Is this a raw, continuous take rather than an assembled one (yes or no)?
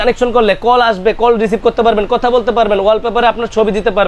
yes